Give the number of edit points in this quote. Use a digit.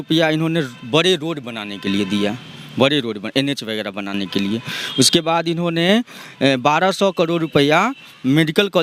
0